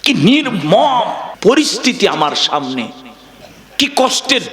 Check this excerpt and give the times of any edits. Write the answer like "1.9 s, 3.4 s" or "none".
1.3 s

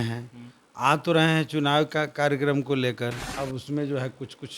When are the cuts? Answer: 3.2 s

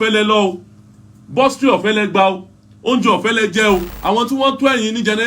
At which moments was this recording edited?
3.9 s

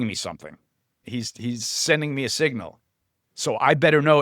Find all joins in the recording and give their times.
1.0 s

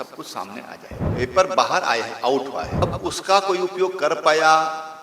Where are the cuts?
1.0 s, 2.7 s

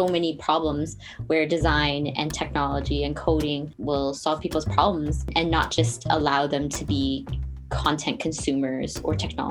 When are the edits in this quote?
3.7 s, 5.3 s

